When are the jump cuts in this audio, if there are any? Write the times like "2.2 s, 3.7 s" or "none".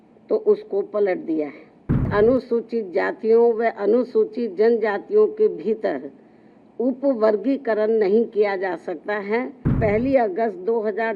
2.1 s, 9.7 s